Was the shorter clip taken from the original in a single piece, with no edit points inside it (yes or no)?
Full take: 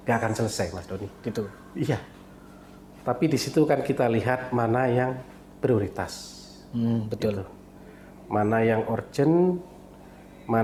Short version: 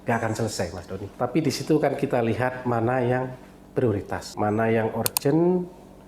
no